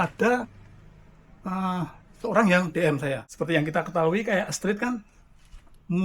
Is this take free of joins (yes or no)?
no